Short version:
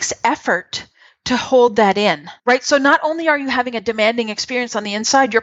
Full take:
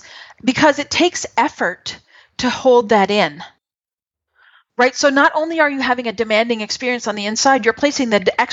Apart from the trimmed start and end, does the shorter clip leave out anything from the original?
yes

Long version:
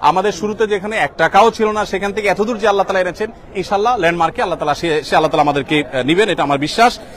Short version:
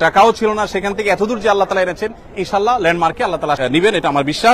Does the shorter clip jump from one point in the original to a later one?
yes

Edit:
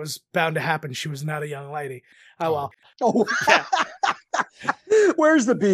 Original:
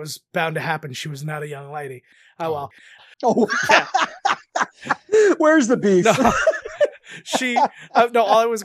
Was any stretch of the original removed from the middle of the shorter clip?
yes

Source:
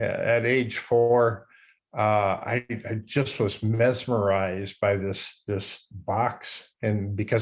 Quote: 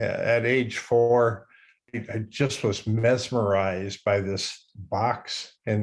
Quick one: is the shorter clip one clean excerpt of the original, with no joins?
no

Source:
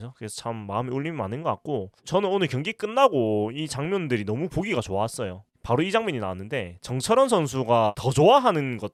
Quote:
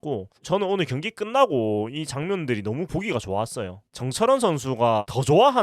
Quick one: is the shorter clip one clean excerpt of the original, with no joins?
no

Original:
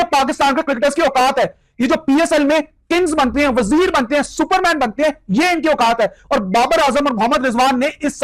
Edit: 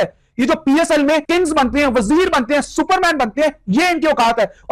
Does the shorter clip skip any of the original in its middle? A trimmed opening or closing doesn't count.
yes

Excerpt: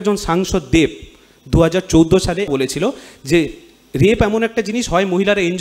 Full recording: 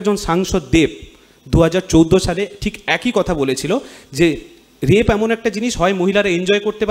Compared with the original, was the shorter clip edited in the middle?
yes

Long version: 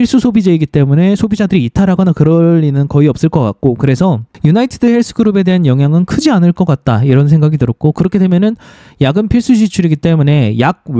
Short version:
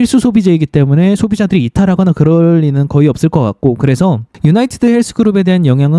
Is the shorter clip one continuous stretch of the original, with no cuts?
yes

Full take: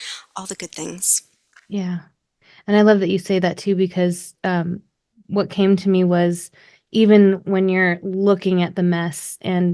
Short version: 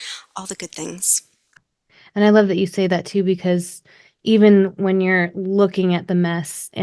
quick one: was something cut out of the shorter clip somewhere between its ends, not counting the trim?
yes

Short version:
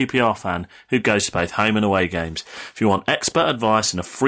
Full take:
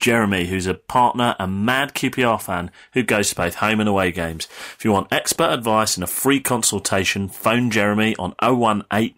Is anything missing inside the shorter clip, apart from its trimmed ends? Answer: no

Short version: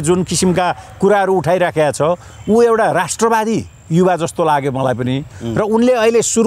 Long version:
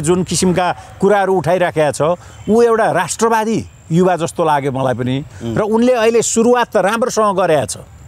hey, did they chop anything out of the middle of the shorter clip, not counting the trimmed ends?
no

